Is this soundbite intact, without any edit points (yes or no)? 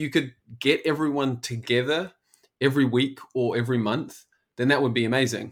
yes